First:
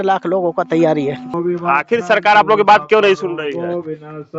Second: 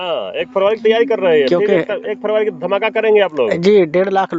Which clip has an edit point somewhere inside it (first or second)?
first